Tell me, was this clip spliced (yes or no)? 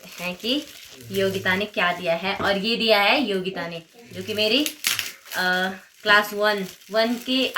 no